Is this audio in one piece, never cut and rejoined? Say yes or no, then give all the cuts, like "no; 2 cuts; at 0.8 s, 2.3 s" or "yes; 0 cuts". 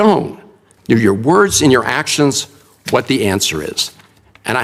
yes; 0 cuts